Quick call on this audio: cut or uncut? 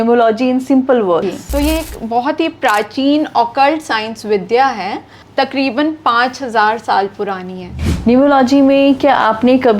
cut